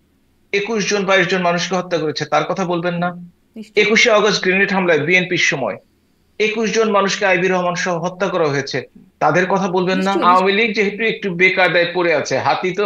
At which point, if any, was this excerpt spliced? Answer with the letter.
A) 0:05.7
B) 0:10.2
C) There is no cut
B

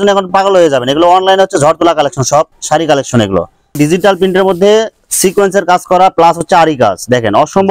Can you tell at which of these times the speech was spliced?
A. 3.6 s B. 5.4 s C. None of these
A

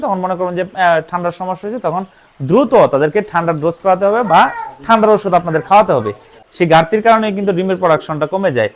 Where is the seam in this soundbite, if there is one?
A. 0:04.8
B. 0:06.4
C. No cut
B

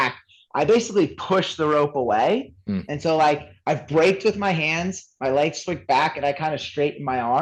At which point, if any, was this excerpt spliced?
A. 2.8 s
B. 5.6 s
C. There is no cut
C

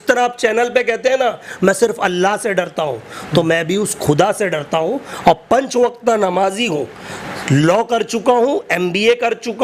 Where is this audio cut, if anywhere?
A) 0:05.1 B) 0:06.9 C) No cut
C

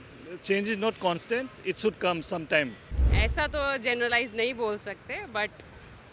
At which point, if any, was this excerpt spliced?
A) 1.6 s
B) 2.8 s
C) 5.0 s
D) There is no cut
B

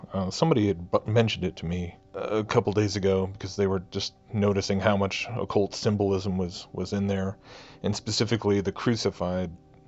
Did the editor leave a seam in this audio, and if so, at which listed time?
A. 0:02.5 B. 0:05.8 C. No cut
C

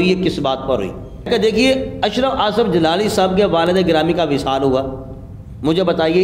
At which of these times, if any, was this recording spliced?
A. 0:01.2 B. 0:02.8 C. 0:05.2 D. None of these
A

